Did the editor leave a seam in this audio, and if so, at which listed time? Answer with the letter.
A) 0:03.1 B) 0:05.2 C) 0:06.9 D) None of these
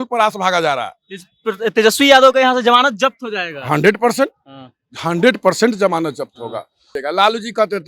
C